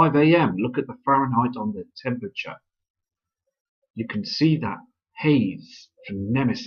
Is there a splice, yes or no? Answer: no